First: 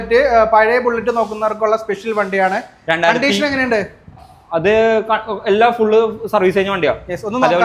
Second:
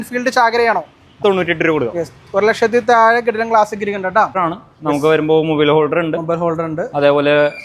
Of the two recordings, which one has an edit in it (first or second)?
second